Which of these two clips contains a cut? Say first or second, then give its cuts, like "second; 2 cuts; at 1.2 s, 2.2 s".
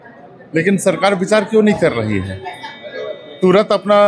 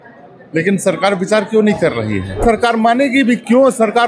second; 1 cut; at 2.4 s